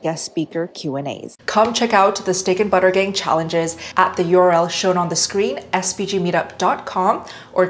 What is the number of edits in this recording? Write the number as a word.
one